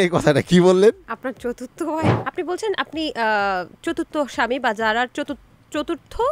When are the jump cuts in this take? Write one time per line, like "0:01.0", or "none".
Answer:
0:02.2